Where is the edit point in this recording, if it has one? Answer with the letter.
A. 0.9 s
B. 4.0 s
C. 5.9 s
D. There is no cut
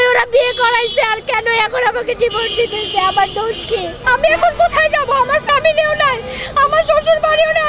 B